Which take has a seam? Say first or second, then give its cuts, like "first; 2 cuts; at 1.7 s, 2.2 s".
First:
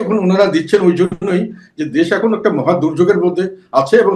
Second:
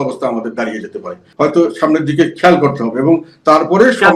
second; 1 cut; at 1.2 s